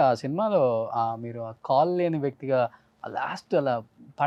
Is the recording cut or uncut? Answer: uncut